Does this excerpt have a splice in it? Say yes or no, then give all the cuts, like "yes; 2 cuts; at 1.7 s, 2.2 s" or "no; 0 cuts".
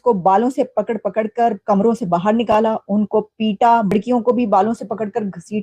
yes; 1 cut; at 3.9 s